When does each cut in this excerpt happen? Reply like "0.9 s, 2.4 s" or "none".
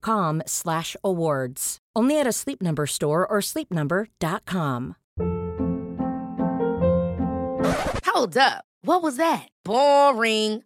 5.0 s